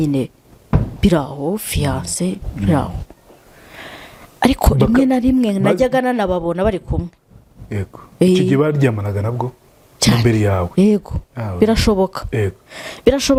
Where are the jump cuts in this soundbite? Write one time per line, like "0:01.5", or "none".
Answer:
none